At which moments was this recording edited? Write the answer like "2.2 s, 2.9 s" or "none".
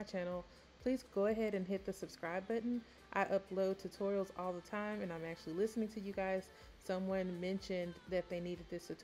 1.0 s